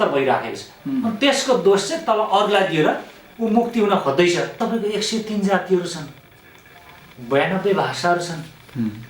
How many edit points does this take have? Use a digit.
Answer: 1